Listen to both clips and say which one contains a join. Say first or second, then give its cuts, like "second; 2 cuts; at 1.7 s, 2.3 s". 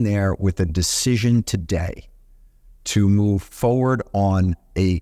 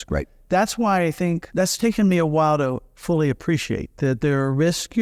second; 1 cut; at 1.5 s